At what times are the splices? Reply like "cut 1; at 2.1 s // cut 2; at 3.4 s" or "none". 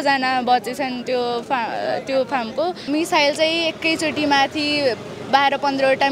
cut 1; at 2.8 s

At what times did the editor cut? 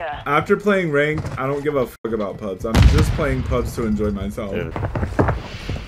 cut 1; at 4.7 s

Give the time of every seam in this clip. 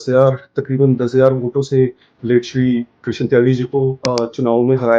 cut 1; at 4.0 s

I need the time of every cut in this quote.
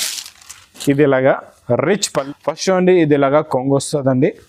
cut 1; at 2.3 s

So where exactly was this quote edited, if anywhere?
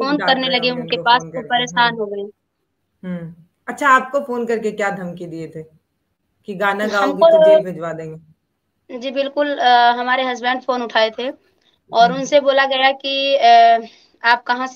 none

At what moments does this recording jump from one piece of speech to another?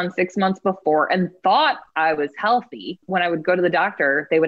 cut 1; at 3.0 s

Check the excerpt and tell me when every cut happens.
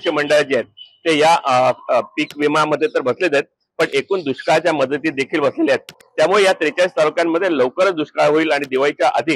none

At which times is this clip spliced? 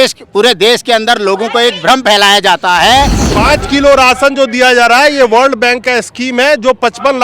cut 1; at 3.2 s

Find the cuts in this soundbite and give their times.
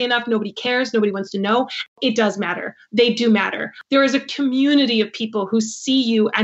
cut 1; at 1.9 s // cut 2; at 3.7 s

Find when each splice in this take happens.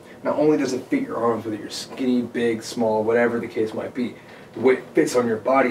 none

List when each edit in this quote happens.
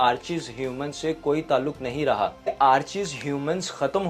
cut 1; at 2.5 s

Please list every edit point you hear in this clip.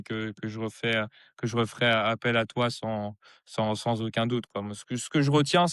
none

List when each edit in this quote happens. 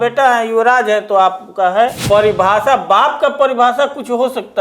cut 1; at 2.0 s

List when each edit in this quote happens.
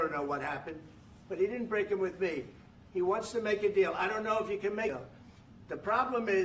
cut 1; at 4.9 s

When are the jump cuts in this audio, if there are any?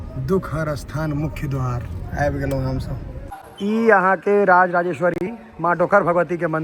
cut 1; at 3.1 s

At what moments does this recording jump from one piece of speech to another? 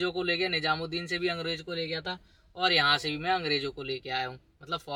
none

